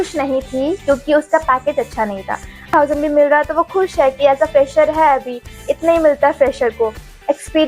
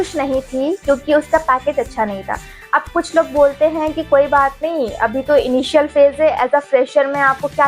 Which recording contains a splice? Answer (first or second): first